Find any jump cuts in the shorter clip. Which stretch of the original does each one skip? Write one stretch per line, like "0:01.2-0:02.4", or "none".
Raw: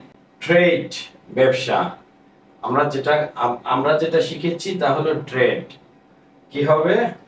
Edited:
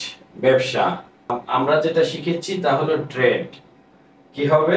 0:02.3-0:03.6